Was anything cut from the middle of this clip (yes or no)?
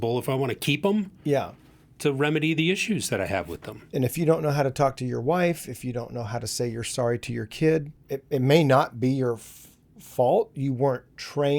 yes